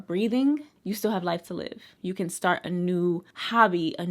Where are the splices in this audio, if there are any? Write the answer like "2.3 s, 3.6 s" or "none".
1.9 s